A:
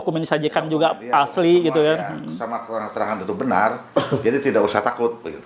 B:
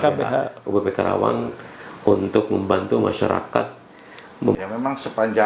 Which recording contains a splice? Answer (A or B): B